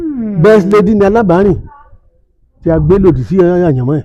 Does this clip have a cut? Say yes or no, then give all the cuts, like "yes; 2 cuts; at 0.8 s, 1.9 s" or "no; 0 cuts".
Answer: no; 0 cuts